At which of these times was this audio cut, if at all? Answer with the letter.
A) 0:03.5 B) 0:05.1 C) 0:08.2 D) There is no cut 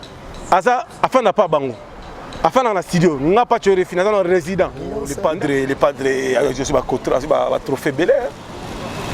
B